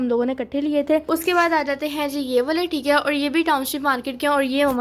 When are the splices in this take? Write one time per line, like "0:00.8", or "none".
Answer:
0:01.0

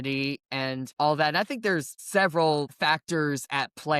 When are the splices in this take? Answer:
0:00.9
0:01.9
0:02.7

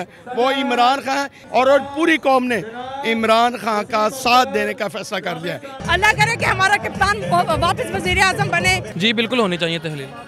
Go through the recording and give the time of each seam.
0:01.4
0:05.8
0:08.9

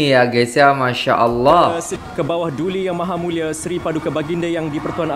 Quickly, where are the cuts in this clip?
0:01.9

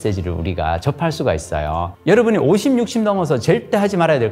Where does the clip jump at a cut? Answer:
0:01.9

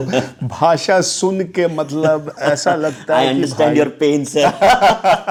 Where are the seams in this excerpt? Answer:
none

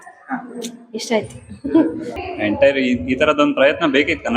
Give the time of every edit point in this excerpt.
0:02.1

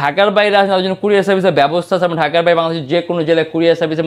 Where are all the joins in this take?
none

